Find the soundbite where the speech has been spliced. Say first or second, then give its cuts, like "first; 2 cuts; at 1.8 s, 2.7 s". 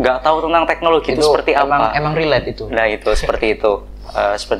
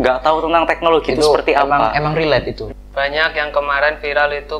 second; 1 cut; at 2.6 s